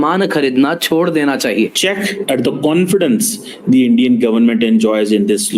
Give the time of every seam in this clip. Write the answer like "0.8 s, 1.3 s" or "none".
2.2 s